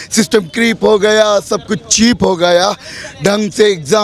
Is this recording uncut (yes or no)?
yes